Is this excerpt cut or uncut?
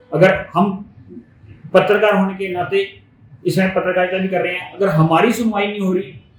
uncut